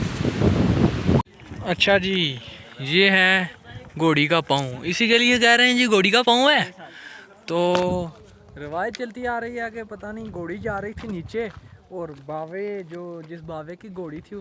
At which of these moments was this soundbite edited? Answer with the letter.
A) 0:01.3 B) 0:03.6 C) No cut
A